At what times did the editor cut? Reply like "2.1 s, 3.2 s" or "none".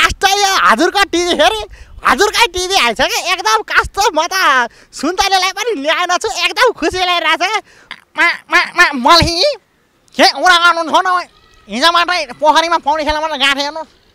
7.9 s